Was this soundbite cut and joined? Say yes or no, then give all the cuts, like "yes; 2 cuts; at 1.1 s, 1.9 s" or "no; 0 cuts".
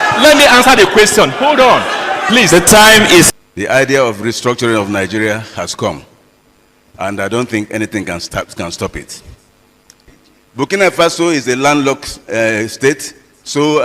yes; 2 cuts; at 3.3 s, 10.0 s